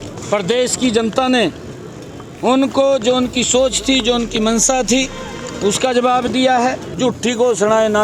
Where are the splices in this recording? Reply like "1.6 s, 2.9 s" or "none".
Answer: 6.9 s